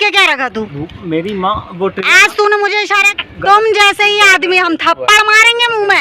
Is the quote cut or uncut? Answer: cut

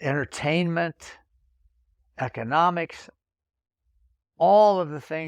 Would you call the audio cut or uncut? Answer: uncut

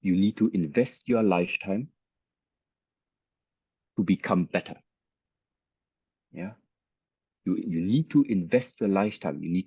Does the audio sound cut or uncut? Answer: uncut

